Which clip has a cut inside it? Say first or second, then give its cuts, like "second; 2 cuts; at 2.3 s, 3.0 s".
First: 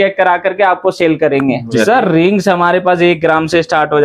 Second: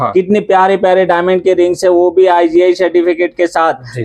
first; 1 cut; at 1.7 s